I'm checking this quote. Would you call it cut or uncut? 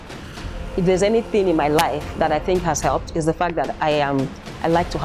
uncut